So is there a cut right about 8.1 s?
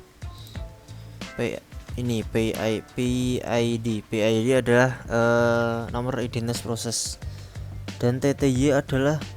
no; 1 cut; at 1.3 s

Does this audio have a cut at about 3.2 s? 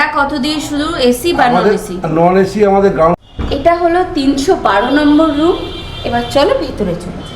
yes; 1 cut; at 3.2 s

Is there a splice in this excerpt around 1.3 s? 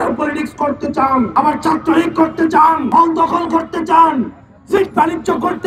yes; 2 cuts; at 1.3 s, 2.8 s

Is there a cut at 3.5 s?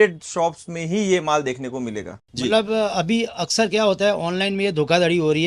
no; 1 cut; at 2.2 s

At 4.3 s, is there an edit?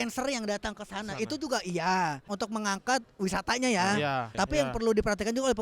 yes; 2 cuts; at 2.2 s, 4.3 s

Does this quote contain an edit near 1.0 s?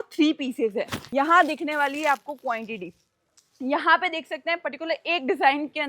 yes; 1 cut; at 1.0 s

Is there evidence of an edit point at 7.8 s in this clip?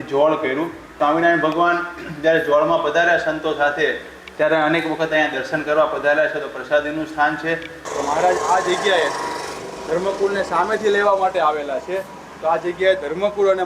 yes; 2 cuts; at 1.0 s, 7.8 s

